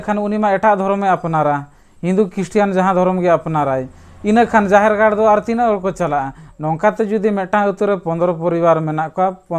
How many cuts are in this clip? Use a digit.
0